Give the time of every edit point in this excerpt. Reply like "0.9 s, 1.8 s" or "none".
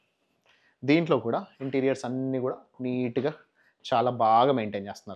none

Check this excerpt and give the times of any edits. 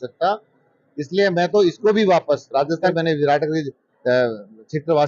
2.9 s

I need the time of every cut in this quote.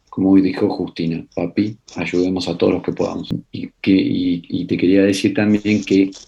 3.4 s

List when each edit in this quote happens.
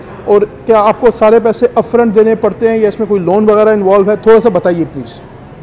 none

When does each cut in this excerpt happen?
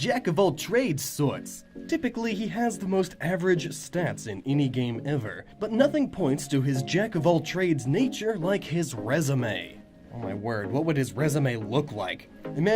none

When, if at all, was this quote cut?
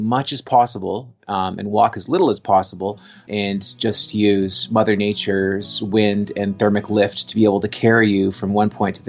3.2 s

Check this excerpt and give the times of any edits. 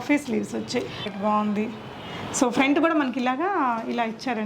1.0 s

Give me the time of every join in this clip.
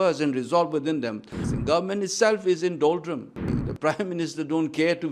1.4 s, 3.5 s

